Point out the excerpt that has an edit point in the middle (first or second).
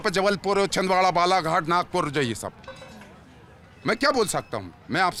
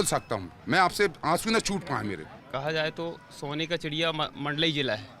second